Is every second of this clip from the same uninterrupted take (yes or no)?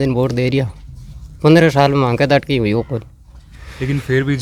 yes